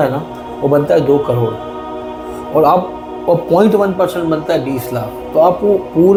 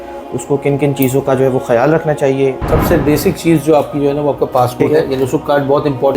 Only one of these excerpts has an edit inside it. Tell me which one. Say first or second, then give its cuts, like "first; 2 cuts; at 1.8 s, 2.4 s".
second; 2 cuts; at 2.6 s, 4.8 s